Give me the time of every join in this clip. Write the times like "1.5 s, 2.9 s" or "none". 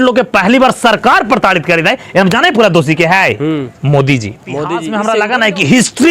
4.8 s